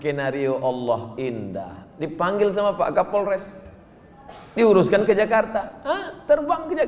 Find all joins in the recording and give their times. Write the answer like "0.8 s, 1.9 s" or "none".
none